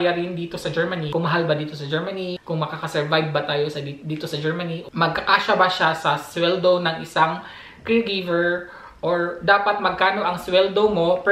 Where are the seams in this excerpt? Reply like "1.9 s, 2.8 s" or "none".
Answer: 1.1 s, 4.8 s